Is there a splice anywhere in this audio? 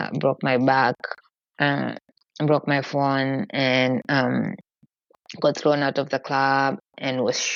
no; 0 cuts

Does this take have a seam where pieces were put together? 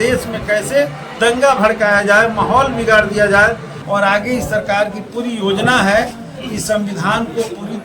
yes; 1 cut; at 3.7 s

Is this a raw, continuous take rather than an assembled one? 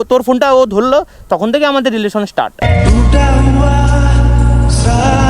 no; 1 cut; at 2.6 s

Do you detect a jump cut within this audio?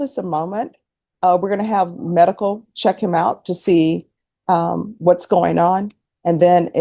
no; 0 cuts

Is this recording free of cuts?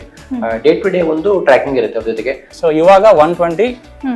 no; 1 cut; at 2.4 s

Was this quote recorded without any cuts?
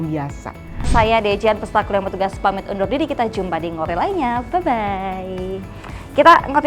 no; 2 cuts; at 0.9 s, 3.9 s

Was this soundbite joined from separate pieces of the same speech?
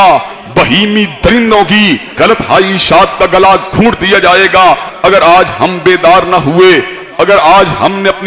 yes; 1 cut; at 4.9 s

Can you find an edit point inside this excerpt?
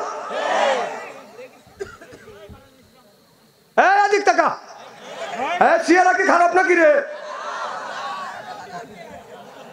no; 0 cuts

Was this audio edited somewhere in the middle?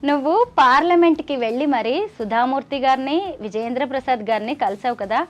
no; 0 cuts

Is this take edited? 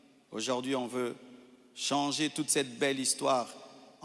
no; 0 cuts

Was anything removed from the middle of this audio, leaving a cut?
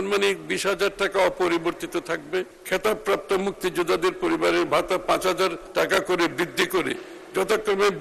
yes; 2 cuts; at 2.6 s, 5.6 s

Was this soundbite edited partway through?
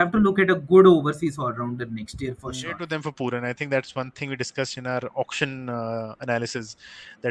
yes; 1 cut; at 2.8 s

